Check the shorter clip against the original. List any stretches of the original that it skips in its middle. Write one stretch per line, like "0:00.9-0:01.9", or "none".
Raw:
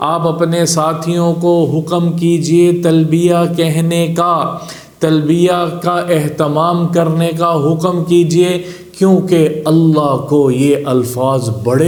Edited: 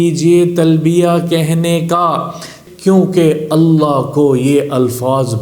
0:04.8-0:08.7